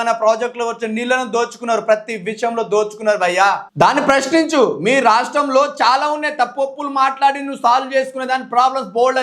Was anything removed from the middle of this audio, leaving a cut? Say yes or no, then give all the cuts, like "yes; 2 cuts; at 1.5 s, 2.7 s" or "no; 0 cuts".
yes; 1 cut; at 3.7 s